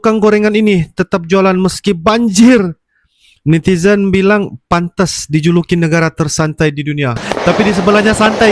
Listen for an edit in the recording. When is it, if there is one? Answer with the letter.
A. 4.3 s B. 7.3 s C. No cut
B